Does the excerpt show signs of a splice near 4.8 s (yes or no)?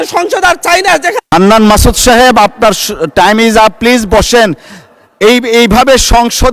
no